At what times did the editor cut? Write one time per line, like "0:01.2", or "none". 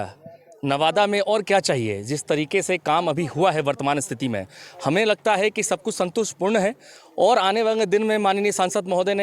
none